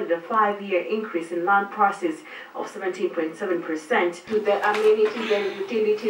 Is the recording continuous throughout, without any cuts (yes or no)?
no